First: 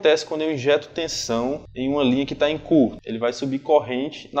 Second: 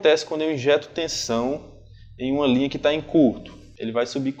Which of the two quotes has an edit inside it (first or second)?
first